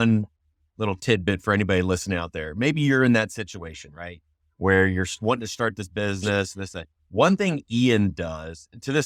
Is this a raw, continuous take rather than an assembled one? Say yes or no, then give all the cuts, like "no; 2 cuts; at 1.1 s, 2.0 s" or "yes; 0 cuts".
yes; 0 cuts